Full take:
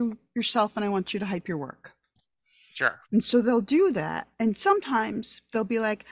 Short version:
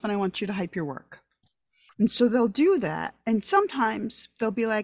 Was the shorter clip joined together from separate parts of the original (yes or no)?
yes